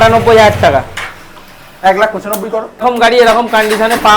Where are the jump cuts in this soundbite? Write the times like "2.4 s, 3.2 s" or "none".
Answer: 2.8 s